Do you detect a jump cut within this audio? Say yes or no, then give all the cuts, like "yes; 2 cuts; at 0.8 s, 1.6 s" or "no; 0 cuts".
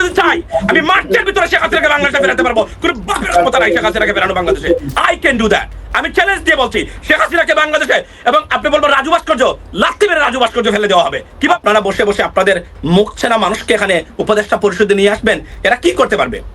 yes; 1 cut; at 11.6 s